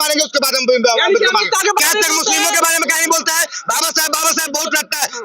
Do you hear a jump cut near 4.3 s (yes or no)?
no